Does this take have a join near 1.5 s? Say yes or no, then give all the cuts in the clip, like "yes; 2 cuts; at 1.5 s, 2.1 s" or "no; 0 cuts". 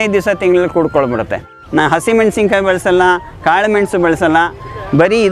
yes; 1 cut; at 1.5 s